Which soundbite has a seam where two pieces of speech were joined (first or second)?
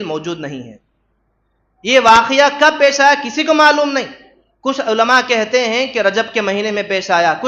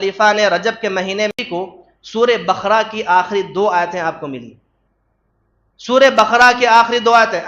second